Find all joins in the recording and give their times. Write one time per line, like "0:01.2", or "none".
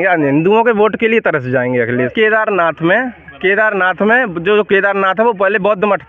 0:02.1